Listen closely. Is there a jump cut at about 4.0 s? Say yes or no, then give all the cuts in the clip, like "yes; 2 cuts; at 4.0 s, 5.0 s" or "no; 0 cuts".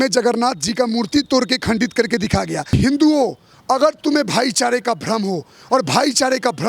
no; 1 cut; at 2.7 s